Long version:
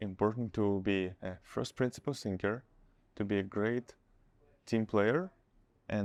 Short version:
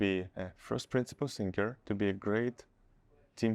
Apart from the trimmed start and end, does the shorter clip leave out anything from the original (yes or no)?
yes